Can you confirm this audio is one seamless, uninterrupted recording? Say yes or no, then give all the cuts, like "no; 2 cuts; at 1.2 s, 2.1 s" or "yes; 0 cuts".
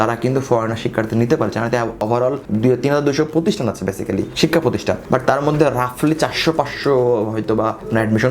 no; 1 cut; at 2.1 s